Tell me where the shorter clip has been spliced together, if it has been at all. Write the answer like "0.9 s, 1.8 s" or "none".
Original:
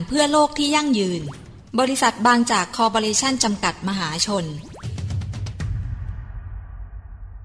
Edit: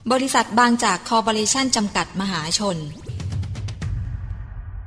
3.1 s